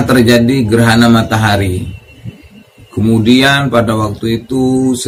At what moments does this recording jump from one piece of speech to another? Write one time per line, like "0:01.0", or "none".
none